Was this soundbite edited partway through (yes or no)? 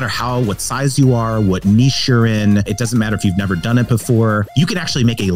yes